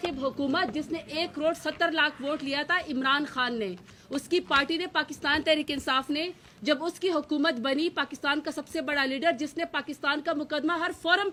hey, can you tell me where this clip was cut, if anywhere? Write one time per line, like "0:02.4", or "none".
none

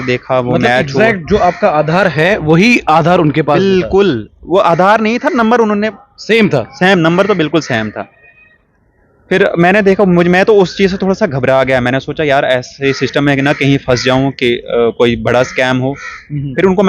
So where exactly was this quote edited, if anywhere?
none

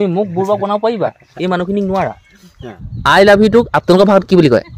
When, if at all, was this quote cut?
0:02.9

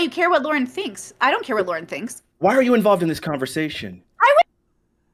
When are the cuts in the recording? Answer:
none

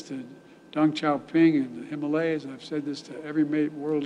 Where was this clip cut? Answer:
0:01.8

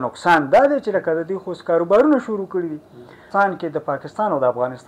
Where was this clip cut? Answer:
0:03.2

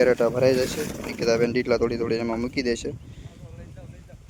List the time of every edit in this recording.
none

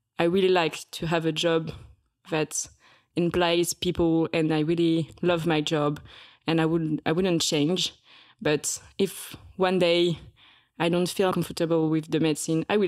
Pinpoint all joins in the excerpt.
0:11.3

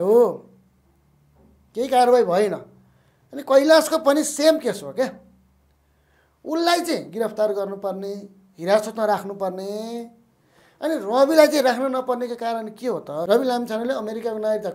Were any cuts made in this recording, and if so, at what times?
0:13.2

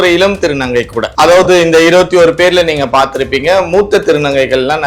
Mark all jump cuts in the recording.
0:01.0

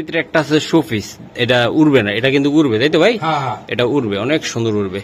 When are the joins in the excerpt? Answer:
none

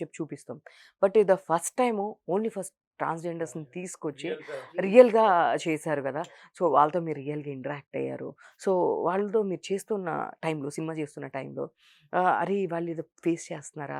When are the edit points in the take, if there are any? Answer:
none

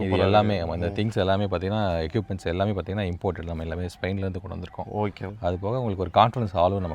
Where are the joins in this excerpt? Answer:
0:05.3

